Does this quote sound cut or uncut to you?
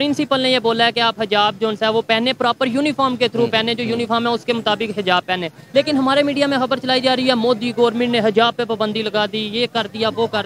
uncut